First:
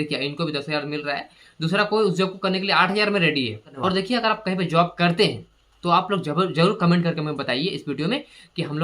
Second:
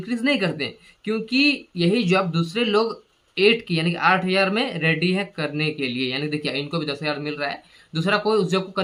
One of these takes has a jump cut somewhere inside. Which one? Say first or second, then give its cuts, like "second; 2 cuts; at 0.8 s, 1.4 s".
first; 1 cut; at 3.7 s